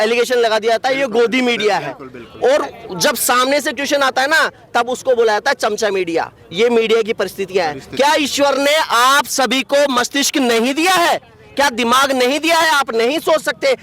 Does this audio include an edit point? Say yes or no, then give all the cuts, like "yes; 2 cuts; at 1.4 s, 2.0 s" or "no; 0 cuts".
no; 0 cuts